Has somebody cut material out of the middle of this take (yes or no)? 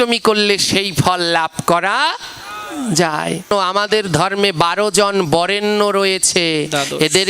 yes